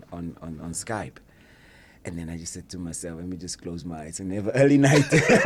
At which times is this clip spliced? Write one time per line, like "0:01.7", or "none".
none